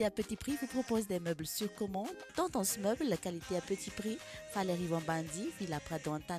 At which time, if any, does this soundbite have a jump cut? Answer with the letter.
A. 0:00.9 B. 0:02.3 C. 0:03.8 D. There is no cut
D